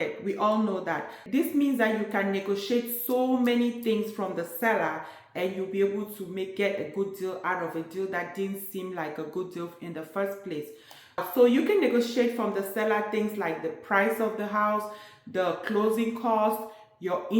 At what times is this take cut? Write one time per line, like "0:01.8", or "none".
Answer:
0:01.2